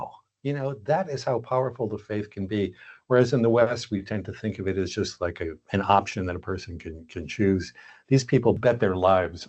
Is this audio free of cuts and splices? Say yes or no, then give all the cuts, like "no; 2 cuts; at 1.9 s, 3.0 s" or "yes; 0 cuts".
no; 1 cut; at 8.6 s